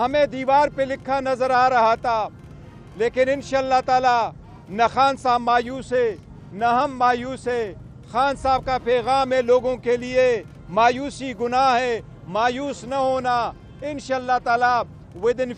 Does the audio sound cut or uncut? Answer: uncut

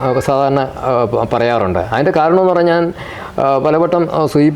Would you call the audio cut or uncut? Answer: uncut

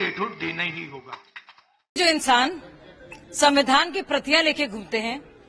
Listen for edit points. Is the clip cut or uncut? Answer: uncut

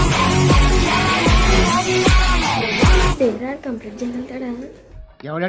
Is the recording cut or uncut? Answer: cut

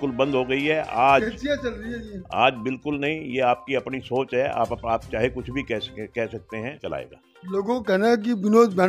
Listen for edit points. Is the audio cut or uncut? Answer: cut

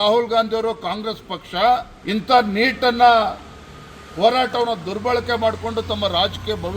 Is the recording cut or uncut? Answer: cut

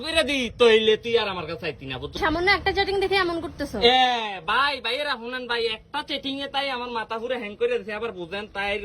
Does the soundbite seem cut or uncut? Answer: cut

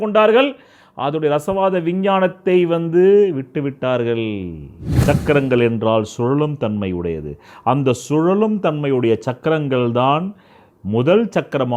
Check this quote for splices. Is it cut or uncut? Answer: cut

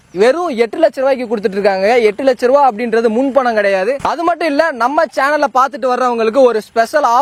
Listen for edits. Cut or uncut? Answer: uncut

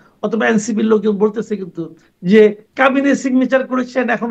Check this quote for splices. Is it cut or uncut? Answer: uncut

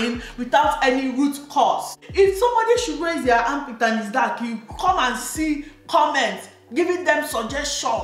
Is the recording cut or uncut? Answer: cut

